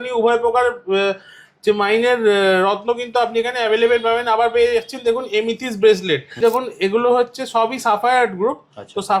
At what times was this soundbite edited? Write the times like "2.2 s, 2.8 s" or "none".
6.4 s